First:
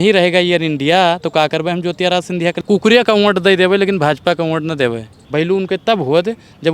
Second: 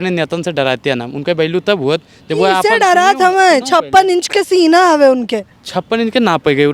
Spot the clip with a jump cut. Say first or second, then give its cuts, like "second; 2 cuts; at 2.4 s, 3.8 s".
first; 2 cuts; at 2.6 s, 5.1 s